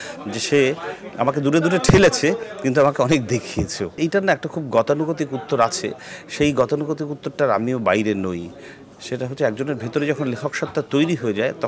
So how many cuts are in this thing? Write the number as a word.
zero